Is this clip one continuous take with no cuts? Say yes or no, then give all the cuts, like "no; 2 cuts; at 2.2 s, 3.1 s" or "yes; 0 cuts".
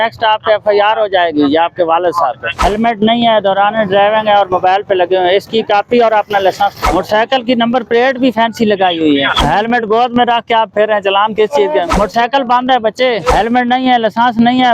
no; 5 cuts; at 2.5 s, 6.8 s, 9.4 s, 11.9 s, 13.3 s